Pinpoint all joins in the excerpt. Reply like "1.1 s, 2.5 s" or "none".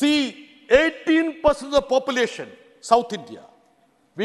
none